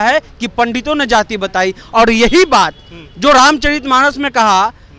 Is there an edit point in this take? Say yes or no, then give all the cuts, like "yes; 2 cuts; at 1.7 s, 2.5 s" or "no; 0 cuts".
no; 0 cuts